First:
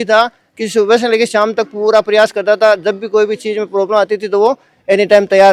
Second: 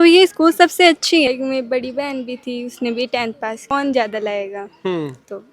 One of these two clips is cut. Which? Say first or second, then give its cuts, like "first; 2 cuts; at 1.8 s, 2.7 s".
second; 2 cuts; at 1.3 s, 3.7 s